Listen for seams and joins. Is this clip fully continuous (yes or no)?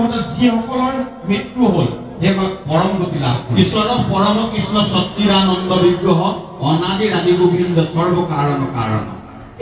no